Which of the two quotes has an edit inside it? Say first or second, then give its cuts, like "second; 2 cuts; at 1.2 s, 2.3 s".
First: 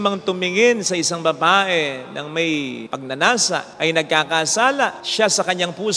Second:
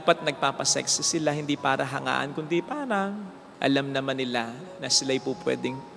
first; 3 cuts; at 2.9 s, 3.7 s, 5.0 s